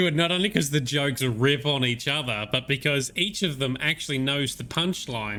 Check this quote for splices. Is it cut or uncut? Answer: uncut